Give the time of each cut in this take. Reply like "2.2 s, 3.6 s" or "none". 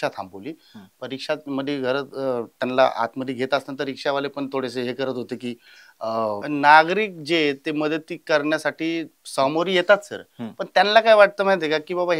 6.4 s